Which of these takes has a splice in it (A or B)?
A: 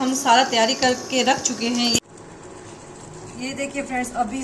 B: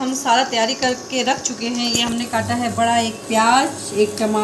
A